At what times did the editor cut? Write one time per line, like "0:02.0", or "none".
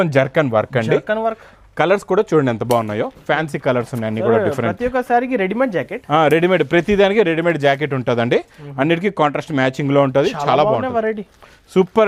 none